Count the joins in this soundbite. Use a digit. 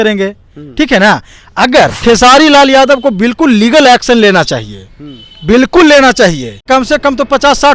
2